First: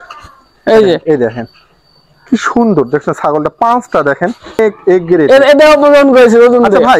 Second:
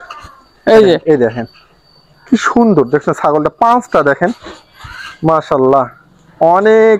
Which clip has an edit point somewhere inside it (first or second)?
first